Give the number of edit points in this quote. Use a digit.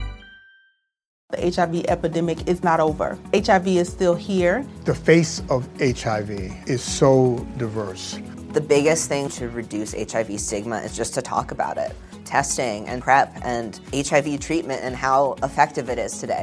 1